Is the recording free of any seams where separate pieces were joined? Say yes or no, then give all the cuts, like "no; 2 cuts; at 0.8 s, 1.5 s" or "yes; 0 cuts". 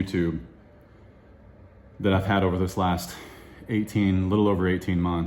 yes; 0 cuts